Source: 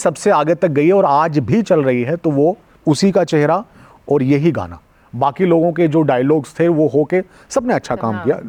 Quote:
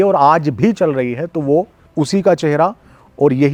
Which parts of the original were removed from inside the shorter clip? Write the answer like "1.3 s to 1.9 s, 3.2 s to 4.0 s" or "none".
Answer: none